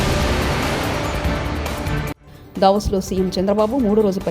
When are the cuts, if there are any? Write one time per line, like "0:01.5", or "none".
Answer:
0:02.2